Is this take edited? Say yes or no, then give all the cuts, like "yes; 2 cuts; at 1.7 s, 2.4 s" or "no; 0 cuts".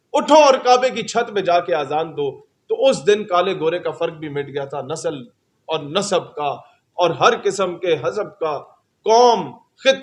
no; 0 cuts